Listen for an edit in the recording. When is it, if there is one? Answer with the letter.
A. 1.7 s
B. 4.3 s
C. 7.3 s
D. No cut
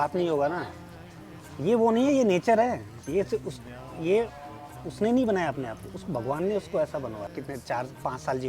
C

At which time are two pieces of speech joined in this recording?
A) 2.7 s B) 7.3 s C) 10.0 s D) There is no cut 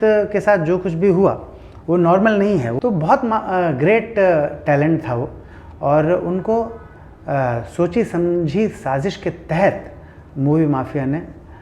A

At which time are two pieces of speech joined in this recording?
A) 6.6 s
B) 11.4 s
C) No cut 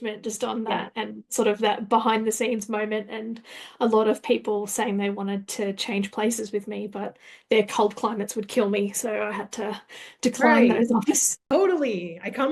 B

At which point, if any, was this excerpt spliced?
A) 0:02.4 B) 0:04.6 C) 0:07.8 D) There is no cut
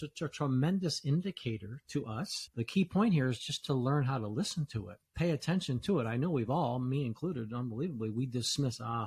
A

